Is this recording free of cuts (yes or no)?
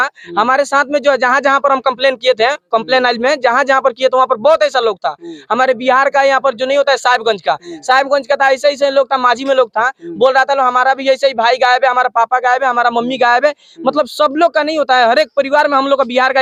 yes